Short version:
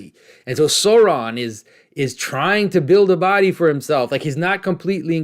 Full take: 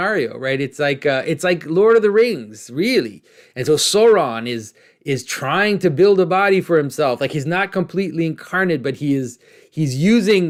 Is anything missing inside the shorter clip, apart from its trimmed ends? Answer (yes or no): no